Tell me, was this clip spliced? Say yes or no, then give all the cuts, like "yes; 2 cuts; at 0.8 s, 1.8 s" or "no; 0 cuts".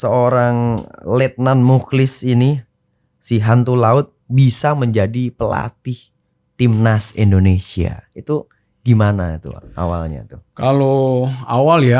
no; 0 cuts